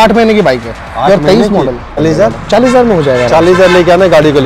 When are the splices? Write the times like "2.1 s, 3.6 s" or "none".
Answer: 2.0 s